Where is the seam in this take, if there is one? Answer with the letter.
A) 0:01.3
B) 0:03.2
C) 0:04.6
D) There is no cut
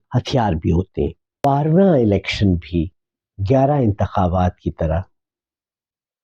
A